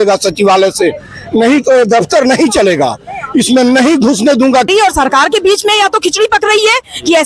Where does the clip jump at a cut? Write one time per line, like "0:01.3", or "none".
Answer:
0:04.7